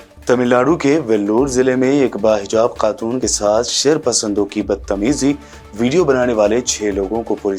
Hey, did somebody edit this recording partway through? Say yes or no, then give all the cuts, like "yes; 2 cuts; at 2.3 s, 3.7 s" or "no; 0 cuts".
no; 0 cuts